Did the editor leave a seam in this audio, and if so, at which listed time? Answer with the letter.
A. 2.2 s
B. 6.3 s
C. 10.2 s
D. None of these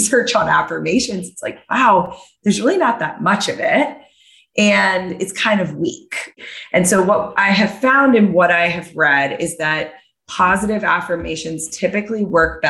B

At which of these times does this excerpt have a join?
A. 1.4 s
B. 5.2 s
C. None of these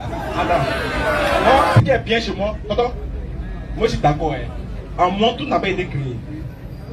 A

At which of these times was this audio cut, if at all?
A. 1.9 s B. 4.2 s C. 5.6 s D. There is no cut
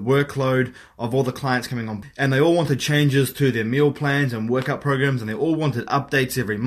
A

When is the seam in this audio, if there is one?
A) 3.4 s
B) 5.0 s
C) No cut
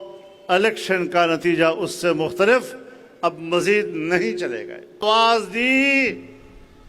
B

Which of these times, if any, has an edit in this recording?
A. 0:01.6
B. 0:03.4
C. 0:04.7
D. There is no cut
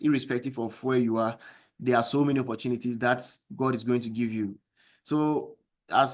D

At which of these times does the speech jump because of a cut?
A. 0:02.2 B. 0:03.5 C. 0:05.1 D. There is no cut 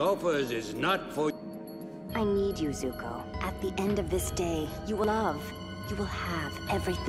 D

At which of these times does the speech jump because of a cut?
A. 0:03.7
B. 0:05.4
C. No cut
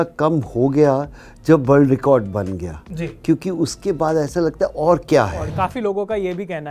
B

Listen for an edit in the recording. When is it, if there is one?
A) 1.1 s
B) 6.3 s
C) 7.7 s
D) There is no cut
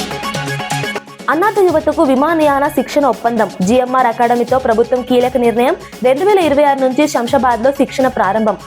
A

